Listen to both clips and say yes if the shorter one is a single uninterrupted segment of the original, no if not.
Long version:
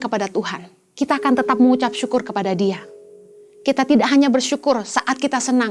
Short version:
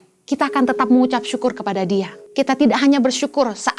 no